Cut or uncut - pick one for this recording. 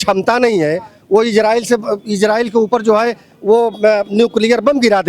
uncut